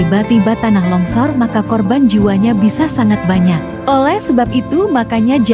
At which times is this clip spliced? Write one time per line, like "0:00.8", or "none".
none